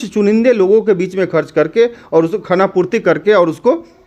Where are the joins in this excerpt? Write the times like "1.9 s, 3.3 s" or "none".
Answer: none

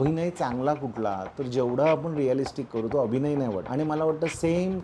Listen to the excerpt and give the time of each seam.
3.6 s

